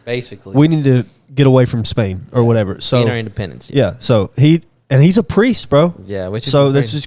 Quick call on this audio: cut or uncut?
uncut